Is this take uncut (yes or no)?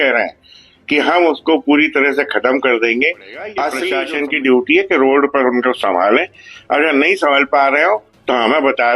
no